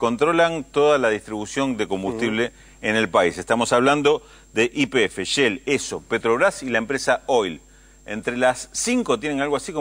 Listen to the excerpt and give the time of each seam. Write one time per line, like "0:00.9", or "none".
none